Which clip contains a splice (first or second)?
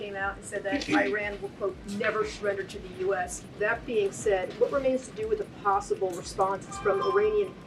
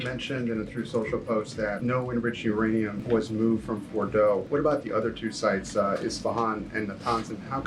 second